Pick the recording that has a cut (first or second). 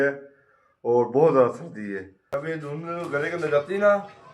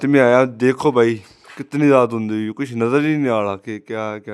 first